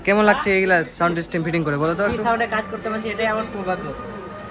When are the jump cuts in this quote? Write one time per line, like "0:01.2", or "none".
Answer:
0:02.2